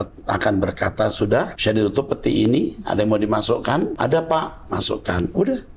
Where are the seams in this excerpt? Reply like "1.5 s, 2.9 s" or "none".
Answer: 1.5 s, 3.9 s